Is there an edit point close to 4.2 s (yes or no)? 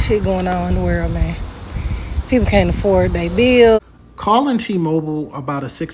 yes